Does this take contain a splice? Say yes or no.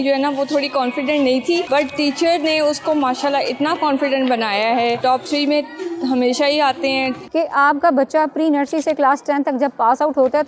yes